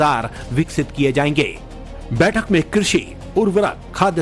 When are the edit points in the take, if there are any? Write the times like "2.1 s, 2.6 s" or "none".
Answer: none